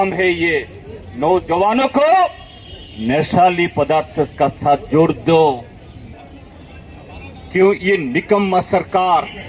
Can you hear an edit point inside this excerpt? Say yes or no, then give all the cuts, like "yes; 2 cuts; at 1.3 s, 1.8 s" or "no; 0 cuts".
yes; 1 cut; at 6.1 s